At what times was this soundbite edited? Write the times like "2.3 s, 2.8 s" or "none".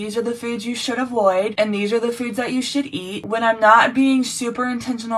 1.5 s, 3.2 s